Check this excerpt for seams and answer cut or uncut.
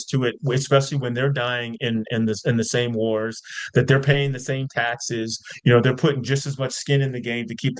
uncut